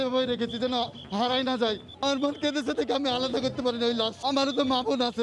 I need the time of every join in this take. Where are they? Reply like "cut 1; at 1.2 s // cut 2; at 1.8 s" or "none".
cut 1; at 1.9 s // cut 2; at 4.1 s